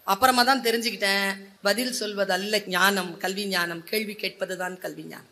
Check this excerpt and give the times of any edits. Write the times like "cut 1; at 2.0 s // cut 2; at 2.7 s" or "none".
cut 1; at 1.5 s // cut 2; at 2.7 s